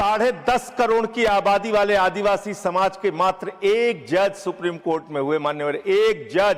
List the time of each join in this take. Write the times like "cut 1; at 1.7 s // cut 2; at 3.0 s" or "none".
none